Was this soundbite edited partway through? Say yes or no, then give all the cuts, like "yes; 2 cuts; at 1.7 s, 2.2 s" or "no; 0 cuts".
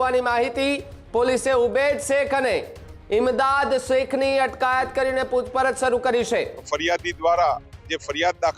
yes; 1 cut; at 6.7 s